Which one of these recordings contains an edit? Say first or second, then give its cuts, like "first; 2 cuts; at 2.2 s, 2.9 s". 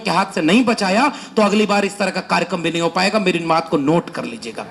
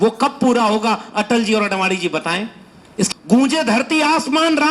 second; 1 cut; at 3.1 s